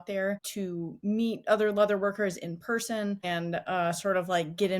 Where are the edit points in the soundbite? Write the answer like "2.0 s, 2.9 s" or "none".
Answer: 3.2 s

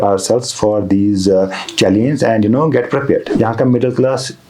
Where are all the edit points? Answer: 3.3 s

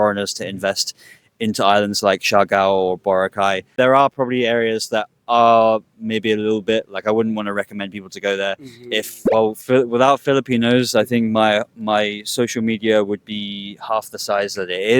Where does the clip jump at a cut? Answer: 3.7 s, 9.2 s

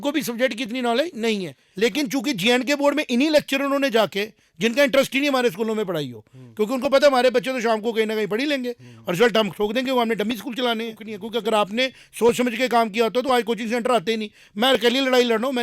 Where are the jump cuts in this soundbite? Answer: 1.6 s, 11.1 s

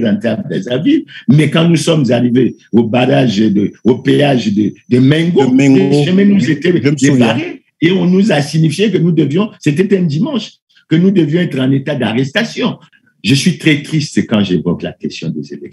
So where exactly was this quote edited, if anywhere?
12.8 s

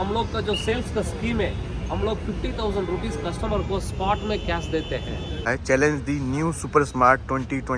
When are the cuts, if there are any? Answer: 5.4 s

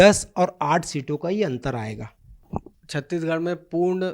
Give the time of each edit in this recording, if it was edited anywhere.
2.3 s

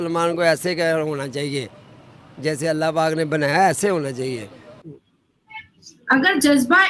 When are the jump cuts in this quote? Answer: 4.8 s

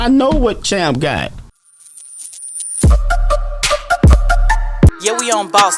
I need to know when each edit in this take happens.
1.5 s

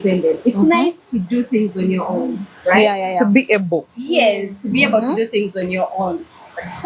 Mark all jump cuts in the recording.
none

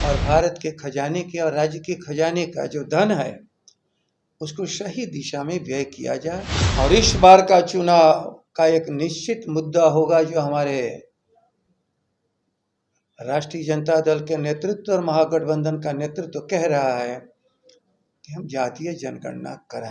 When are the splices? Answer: 6.6 s

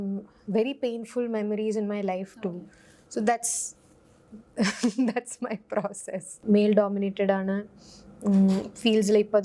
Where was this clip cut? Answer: 6.4 s

